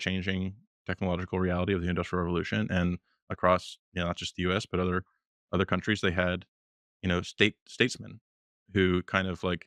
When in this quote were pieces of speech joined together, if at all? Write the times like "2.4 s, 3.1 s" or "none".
none